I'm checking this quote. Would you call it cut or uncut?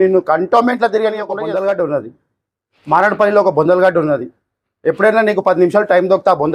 cut